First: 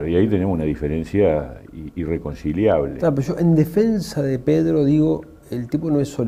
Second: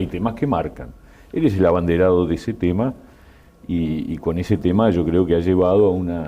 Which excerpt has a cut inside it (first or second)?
second